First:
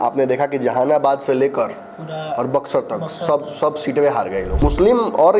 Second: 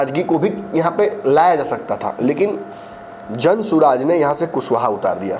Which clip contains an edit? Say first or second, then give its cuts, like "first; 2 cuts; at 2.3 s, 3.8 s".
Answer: first; 1 cut; at 4.5 s